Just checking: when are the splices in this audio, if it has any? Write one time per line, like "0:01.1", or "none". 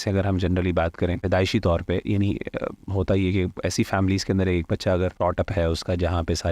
0:01.2
0:05.2